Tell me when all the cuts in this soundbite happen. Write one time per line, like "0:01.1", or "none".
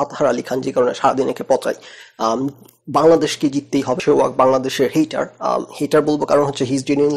0:04.0